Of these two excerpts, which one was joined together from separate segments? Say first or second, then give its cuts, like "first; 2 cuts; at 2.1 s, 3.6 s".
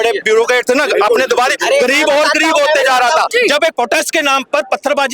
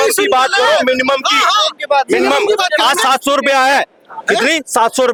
first; 1 cut; at 3.3 s